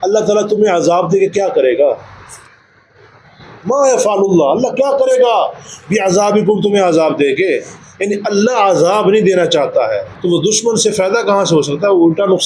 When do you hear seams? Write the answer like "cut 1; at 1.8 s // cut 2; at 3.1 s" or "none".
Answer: cut 1; at 10.1 s